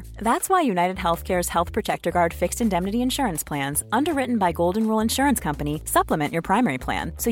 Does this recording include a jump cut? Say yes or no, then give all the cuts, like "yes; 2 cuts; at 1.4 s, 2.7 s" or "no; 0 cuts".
no; 0 cuts